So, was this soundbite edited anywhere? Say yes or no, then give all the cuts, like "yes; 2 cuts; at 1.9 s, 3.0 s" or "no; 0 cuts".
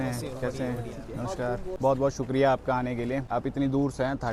yes; 2 cuts; at 1.7 s, 3.2 s